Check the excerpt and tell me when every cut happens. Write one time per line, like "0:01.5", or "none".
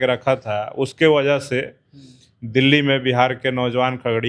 none